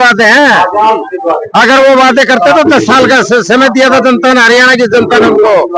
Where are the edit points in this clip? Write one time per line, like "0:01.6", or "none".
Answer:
none